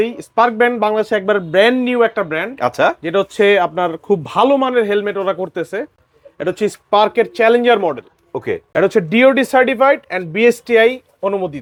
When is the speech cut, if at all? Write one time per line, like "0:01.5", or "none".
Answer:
none